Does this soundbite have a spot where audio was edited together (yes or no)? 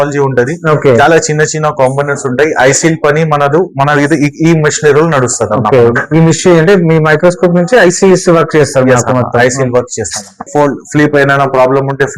yes